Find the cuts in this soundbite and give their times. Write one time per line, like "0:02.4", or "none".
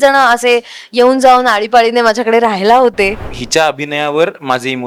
0:03.3